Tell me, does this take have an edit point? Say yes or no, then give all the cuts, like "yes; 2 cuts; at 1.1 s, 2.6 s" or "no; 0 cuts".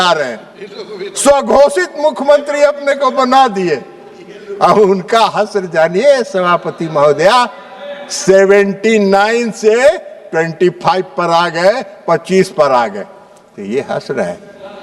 no; 0 cuts